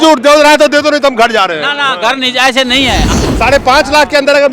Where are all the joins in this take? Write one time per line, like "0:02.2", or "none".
0:03.0